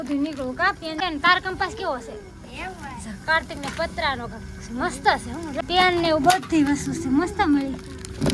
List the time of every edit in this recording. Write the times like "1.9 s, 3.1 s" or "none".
1.0 s, 5.6 s

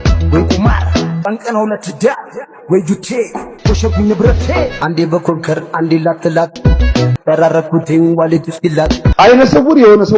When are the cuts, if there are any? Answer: 9.1 s

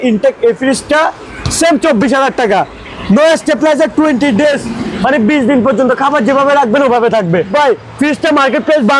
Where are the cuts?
7.5 s

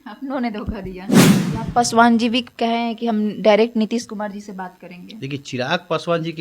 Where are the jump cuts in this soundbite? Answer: 1.3 s

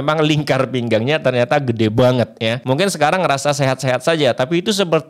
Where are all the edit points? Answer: 2.6 s

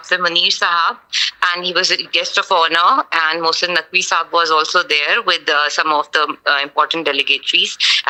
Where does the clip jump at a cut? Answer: none

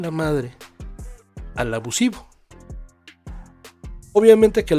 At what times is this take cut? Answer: none

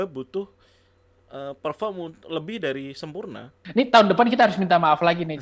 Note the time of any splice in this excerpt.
3.6 s

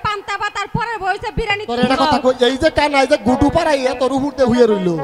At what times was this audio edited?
1.8 s

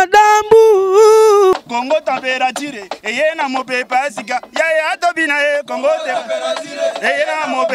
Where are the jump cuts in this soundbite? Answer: none

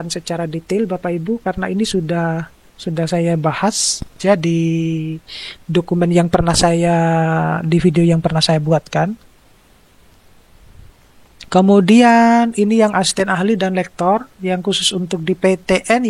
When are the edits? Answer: none

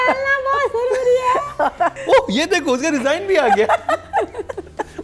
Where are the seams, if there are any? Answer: 2.0 s

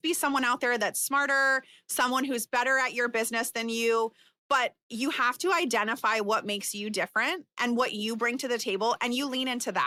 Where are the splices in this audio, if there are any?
none

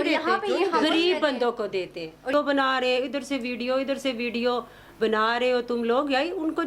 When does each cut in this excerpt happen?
2.3 s

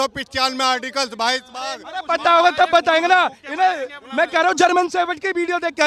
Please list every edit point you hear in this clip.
none

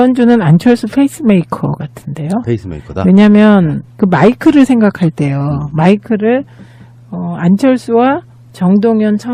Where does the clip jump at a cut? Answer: none

